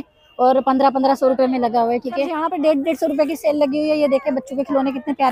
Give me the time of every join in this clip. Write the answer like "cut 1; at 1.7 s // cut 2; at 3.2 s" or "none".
cut 1; at 2.4 s